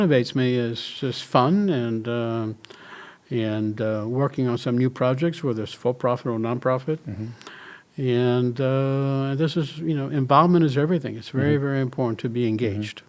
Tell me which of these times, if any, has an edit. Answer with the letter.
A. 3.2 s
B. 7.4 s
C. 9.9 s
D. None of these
D